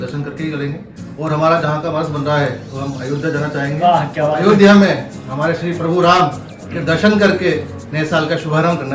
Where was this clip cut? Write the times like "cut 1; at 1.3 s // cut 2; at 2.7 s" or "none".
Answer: none